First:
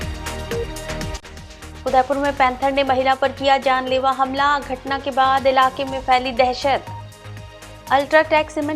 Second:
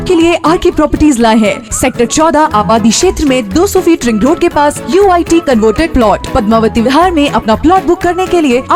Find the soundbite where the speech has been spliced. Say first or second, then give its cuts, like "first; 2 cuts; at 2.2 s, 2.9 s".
first; 1 cut; at 1.0 s